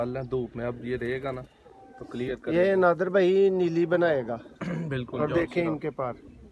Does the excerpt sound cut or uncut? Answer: uncut